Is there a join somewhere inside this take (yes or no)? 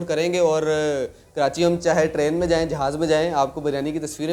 no